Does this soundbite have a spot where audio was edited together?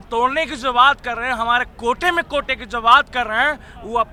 no; 0 cuts

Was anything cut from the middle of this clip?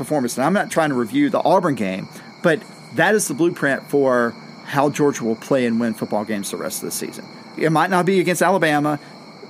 yes; 2 cuts; at 1.3 s, 7.6 s

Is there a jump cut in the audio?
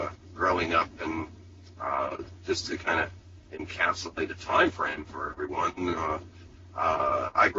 yes; 1 cut; at 4.9 s

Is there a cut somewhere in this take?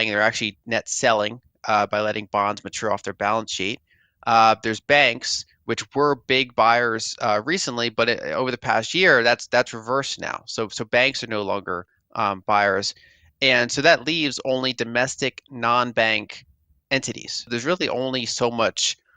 yes; 1 cut; at 17.5 s

